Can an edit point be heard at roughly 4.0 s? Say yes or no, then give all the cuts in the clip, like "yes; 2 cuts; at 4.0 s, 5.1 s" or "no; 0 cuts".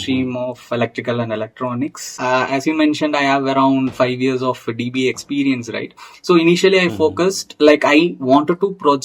no; 1 cut; at 2.1 s